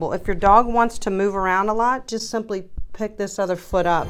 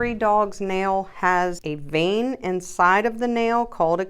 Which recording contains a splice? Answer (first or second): second